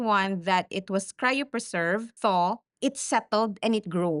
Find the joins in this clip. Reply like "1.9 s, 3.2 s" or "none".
2.1 s, 2.7 s